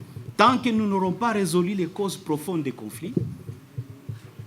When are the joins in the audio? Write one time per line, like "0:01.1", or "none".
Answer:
none